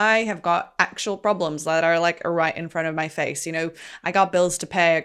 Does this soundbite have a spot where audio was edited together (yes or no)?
no